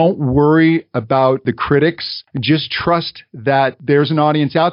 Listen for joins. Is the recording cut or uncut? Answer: uncut